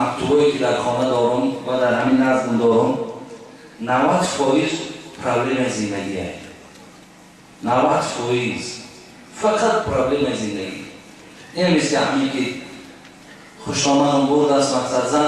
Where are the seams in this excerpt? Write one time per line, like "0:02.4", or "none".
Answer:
none